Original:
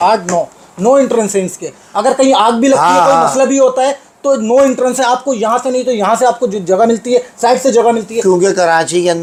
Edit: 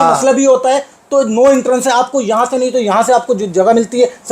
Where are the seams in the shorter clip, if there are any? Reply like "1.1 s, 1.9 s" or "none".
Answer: none

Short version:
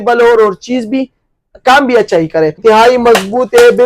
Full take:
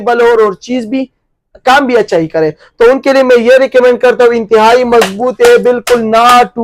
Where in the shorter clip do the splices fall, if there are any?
2.6 s

